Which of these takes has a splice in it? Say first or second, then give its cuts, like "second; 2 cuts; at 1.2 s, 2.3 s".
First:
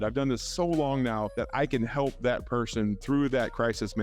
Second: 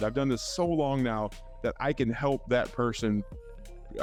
first; 2 cuts; at 1.3 s, 3.0 s